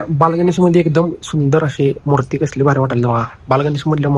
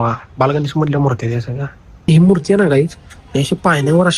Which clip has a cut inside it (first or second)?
second